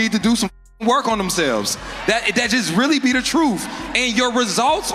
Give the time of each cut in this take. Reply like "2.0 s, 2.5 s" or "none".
none